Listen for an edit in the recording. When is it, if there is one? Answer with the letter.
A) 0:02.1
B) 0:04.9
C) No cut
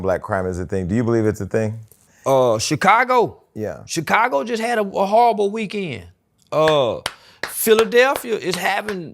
A